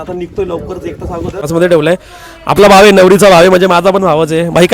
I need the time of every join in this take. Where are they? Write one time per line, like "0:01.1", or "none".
0:01.4